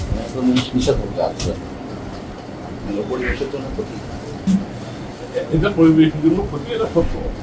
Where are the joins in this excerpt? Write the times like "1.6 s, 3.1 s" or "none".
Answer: none